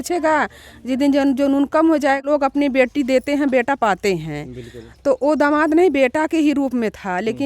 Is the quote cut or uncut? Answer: cut